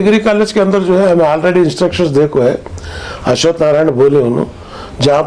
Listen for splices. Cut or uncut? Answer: uncut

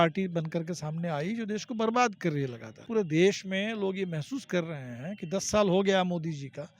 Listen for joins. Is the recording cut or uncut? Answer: cut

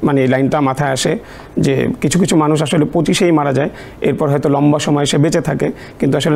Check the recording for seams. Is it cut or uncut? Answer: uncut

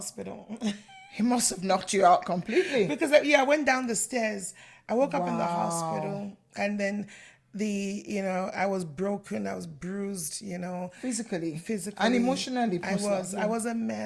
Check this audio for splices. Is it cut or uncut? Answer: uncut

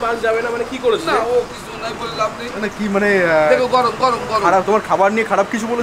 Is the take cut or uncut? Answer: uncut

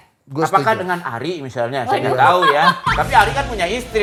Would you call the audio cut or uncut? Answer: uncut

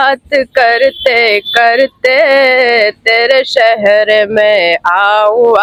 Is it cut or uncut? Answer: uncut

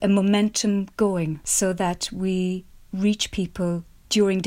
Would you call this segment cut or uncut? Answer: cut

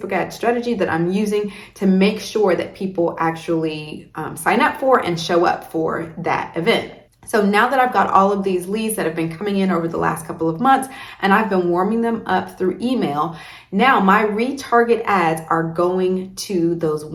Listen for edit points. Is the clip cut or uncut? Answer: uncut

